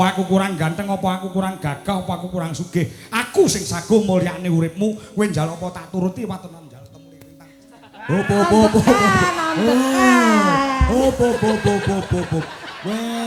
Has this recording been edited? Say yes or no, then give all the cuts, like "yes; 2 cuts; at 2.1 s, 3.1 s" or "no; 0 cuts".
no; 0 cuts